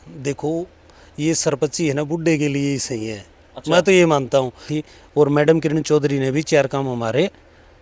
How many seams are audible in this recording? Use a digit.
1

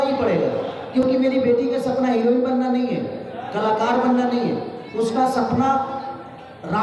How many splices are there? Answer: 0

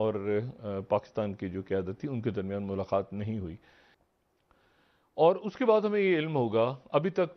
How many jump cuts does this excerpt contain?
1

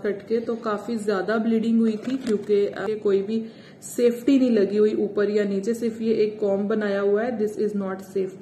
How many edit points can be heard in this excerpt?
1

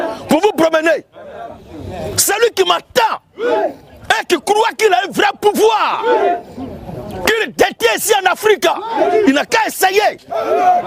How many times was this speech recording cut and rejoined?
0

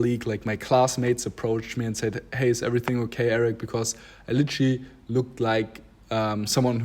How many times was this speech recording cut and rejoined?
0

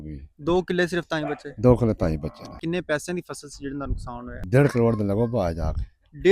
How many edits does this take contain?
2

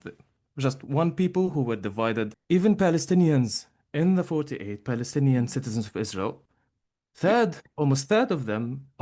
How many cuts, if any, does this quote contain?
1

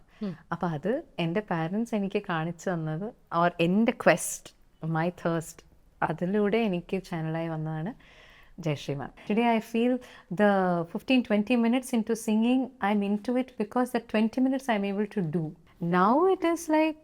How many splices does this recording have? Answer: 2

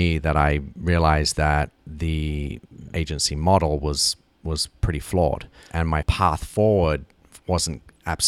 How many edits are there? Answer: 2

